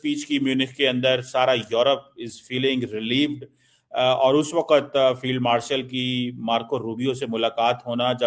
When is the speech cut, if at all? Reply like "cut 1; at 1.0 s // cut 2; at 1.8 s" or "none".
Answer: none